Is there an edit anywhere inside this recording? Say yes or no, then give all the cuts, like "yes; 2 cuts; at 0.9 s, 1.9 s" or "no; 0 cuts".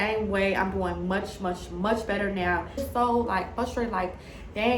yes; 1 cut; at 2.9 s